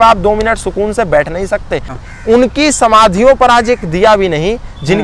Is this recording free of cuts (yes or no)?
no